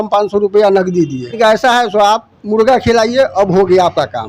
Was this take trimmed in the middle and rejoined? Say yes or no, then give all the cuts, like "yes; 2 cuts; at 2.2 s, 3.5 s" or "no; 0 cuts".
yes; 1 cut; at 1.3 s